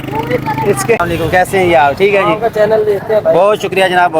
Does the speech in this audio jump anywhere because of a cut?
yes; 1 cut; at 1.0 s

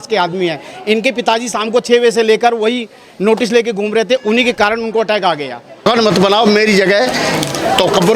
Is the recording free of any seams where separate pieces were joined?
no; 1 cut; at 5.8 s

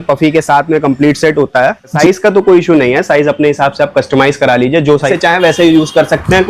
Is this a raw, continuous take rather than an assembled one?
no; 2 cuts; at 1.9 s, 5.1 s

